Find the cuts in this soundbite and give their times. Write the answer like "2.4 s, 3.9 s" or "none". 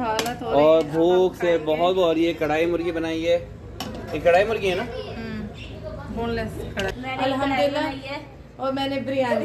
6.9 s